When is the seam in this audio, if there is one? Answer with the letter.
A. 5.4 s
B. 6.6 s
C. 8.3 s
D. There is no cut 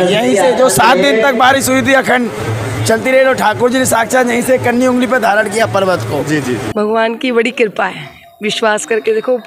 B